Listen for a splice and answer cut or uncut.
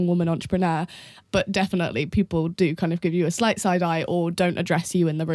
cut